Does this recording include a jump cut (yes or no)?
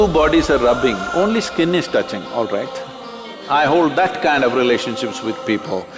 yes